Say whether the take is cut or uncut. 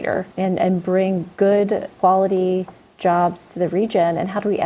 cut